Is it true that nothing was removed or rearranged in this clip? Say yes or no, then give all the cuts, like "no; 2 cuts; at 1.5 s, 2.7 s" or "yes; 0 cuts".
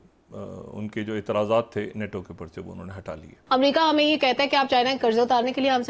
no; 1 cut; at 3.4 s